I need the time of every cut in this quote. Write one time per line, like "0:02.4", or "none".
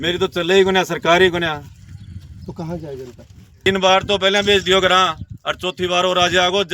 0:03.7